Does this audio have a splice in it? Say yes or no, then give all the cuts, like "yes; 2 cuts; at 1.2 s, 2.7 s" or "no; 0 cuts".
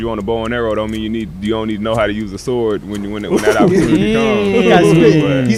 no; 0 cuts